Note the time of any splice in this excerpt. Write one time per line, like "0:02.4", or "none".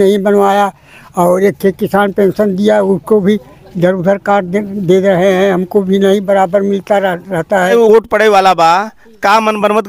0:07.7